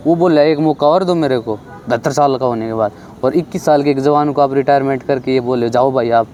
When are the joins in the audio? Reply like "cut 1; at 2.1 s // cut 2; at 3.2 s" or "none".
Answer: none